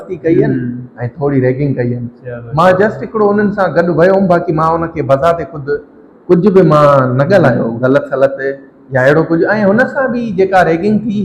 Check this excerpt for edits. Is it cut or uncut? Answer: uncut